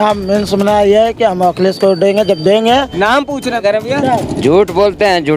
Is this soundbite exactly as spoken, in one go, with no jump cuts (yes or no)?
no